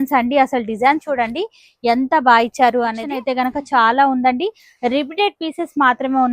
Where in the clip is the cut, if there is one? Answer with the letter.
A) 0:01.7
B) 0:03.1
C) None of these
B